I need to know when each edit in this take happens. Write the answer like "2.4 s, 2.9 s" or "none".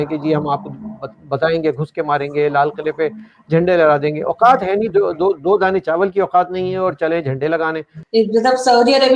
8.0 s